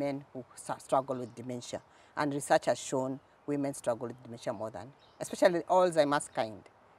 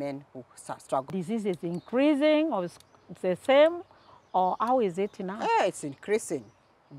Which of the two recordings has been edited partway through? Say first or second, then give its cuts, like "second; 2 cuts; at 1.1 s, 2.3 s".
second; 1 cut; at 1.1 s